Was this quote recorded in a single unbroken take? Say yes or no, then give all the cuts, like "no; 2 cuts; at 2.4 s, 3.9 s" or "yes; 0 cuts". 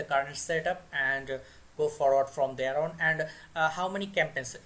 yes; 0 cuts